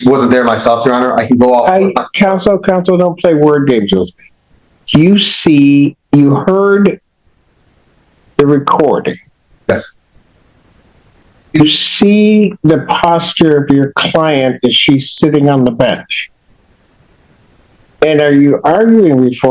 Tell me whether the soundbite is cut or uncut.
uncut